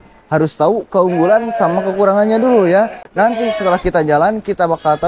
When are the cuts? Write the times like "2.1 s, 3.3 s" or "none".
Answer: 3.0 s